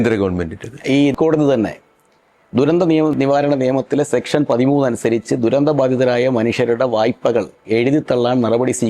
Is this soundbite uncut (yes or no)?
no